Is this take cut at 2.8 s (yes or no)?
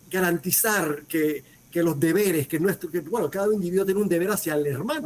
no